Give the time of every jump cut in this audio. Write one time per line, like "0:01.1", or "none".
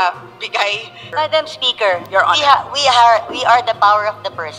0:00.9